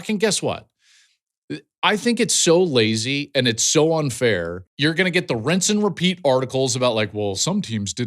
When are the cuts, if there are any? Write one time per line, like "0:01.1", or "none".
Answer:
0:04.6